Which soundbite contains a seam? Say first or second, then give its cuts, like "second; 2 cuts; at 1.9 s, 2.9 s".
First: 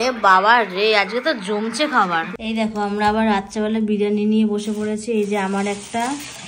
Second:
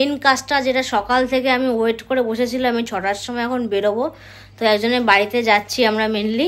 first; 1 cut; at 2.3 s